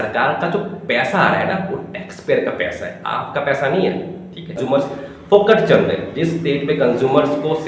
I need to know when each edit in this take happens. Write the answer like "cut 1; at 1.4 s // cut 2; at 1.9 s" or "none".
cut 1; at 4.9 s